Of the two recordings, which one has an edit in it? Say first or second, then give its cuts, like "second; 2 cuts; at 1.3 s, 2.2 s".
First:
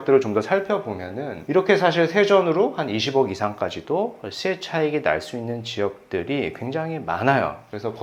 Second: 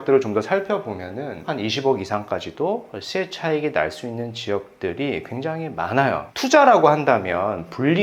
second; 2 cuts; at 1.5 s, 6.3 s